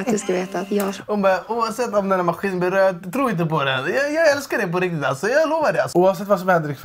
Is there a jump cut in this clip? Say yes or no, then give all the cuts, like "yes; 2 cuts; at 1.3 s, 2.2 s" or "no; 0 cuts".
yes; 1 cut; at 5.9 s